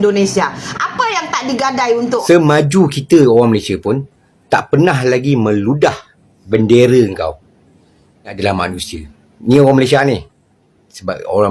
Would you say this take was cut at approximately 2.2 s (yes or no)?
yes